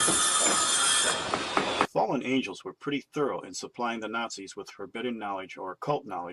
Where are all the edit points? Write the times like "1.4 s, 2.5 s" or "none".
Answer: none